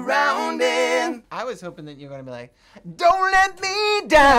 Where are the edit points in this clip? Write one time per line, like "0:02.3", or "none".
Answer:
0:01.3